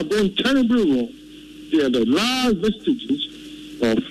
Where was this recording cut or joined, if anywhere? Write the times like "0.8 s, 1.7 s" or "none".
none